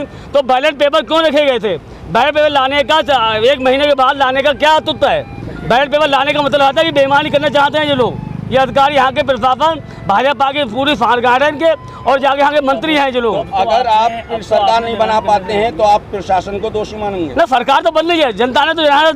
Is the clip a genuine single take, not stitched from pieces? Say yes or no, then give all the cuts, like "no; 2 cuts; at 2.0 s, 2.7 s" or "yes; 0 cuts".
yes; 0 cuts